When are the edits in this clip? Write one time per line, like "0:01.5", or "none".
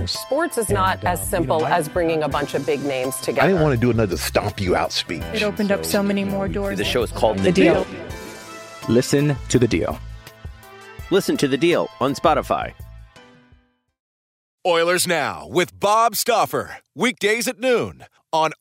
0:14.5